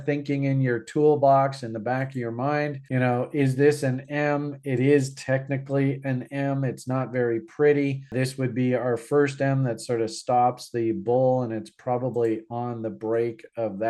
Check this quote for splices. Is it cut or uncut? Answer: uncut